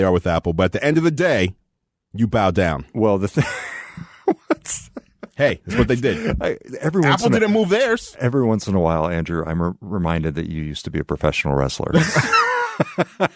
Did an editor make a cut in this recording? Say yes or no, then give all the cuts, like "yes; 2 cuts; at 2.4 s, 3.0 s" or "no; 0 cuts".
yes; 1 cut; at 2.0 s